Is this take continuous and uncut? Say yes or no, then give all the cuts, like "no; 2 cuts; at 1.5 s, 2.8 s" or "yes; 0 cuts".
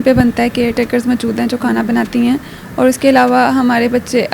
yes; 0 cuts